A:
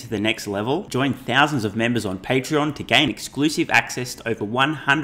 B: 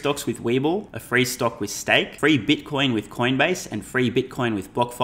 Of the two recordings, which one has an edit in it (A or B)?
B